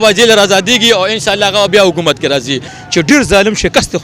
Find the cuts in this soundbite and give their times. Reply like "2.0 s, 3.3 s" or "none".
2.7 s